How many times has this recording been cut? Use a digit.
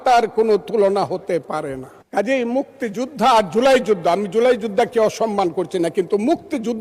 1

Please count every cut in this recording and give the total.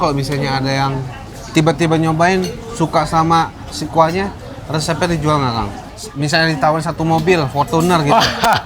1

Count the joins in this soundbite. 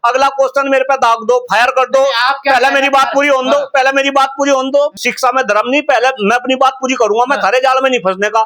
1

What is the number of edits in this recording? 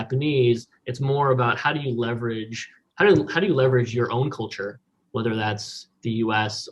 0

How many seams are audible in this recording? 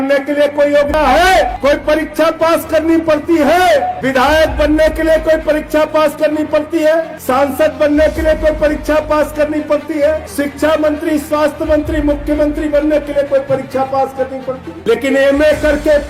6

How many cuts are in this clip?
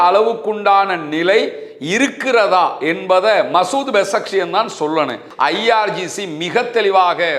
1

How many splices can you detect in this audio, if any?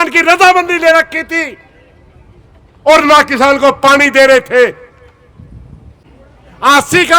1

